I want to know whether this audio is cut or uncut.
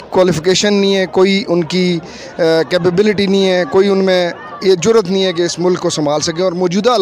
uncut